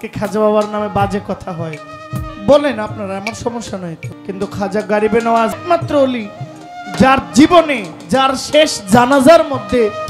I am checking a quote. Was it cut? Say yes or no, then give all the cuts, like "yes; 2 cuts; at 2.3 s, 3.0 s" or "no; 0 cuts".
yes; 2 cuts; at 4.1 s, 5.5 s